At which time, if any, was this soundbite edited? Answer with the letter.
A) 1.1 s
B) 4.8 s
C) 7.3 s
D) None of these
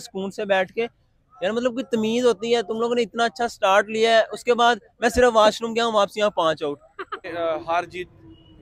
C